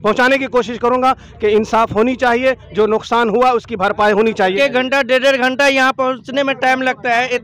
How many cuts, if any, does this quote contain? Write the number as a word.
one